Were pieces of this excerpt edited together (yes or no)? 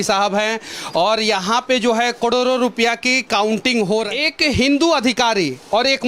yes